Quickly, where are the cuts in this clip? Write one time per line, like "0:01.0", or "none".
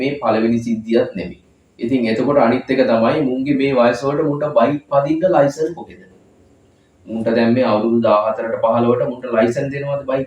none